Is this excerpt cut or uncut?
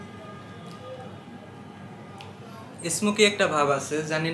uncut